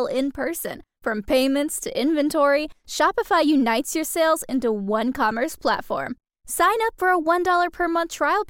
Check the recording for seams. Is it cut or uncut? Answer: uncut